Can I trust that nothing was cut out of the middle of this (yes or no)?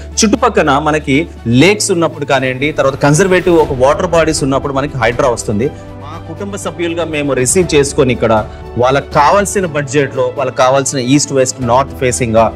no